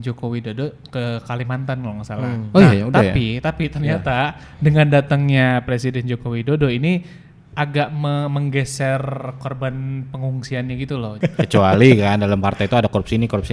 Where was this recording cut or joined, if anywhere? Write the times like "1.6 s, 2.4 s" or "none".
11.2 s